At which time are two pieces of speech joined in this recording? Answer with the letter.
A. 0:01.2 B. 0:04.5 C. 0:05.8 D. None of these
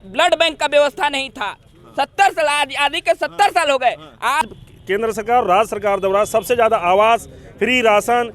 B